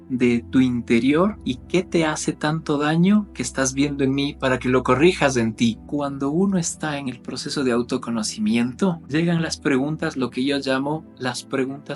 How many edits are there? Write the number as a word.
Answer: three